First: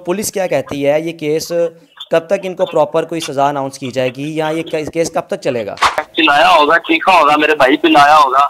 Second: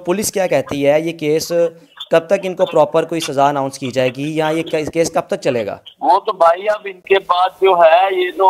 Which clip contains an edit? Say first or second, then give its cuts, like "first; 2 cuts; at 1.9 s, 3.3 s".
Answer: first; 1 cut; at 6.0 s